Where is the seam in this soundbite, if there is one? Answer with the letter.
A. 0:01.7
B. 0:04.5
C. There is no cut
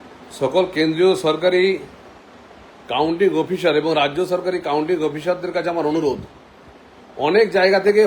A